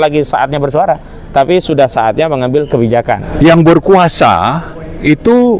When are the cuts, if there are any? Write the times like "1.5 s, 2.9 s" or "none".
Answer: 3.2 s